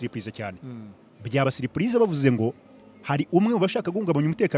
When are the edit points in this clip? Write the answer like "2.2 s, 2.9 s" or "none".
none